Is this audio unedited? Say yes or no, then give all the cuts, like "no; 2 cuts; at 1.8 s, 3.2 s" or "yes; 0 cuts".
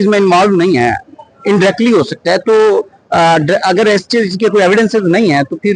yes; 0 cuts